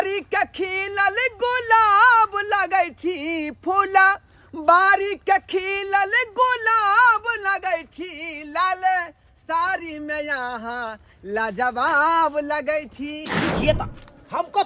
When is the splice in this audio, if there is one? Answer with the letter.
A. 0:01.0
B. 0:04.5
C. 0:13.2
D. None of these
C